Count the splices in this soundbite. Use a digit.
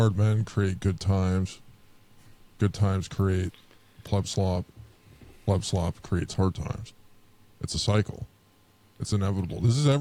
0